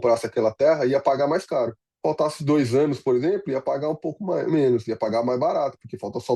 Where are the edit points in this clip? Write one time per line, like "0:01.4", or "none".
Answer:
0:01.8